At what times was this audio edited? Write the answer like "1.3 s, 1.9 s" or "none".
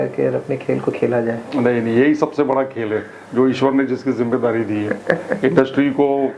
none